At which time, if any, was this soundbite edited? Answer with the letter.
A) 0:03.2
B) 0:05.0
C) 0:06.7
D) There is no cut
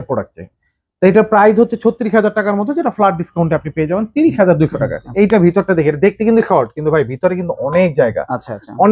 B